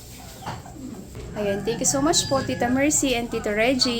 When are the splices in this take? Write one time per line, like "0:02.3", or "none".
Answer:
0:01.3